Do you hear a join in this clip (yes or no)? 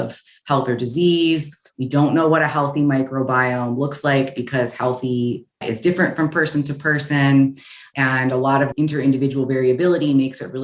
no